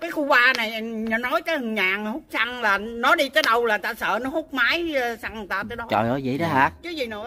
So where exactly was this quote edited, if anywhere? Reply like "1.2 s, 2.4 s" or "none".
none